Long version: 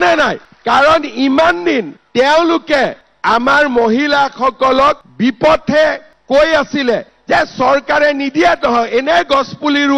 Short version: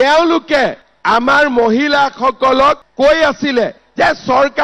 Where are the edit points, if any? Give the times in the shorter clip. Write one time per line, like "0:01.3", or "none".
0:02.9